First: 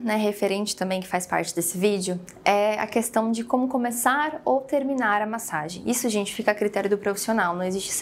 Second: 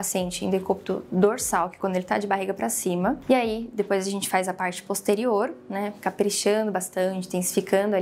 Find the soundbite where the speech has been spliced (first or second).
second